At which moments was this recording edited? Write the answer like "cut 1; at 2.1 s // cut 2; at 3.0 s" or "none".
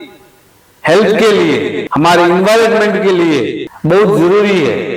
cut 1; at 1.8 s // cut 2; at 3.7 s